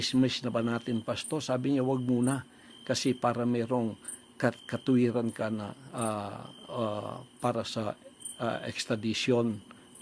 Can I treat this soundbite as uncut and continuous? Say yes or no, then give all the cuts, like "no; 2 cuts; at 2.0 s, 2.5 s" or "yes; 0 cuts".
no; 2 cuts; at 1.9 s, 8.2 s